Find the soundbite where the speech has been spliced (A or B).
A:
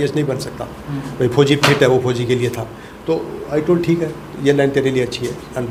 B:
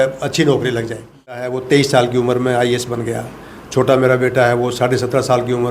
B